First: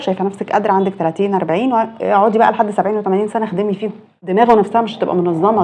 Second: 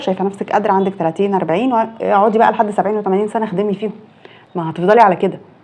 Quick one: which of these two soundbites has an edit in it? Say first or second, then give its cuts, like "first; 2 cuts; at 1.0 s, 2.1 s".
first; 1 cut; at 4.2 s